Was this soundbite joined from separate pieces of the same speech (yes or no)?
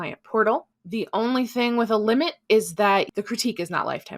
yes